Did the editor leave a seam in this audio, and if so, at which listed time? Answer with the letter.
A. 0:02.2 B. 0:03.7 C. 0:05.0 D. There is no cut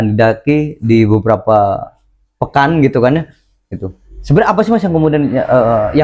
D